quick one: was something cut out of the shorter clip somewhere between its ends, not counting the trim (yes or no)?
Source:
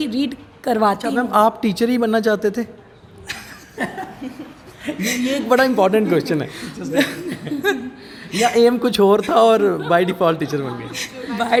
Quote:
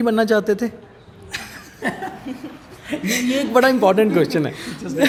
no